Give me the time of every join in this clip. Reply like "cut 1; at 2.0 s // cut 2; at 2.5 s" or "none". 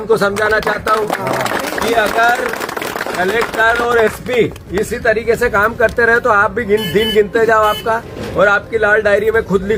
none